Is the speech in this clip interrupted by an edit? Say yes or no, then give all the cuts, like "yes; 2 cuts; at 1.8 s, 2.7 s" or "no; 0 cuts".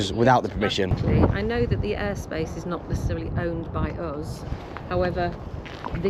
yes; 1 cut; at 1.0 s